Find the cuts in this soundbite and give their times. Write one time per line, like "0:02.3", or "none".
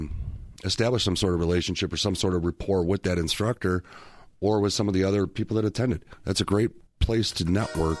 0:06.9